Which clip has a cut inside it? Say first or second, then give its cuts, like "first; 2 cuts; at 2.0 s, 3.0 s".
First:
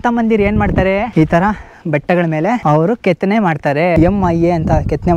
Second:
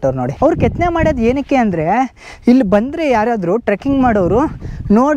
first; 3 cuts; at 1.1 s, 2.6 s, 3.9 s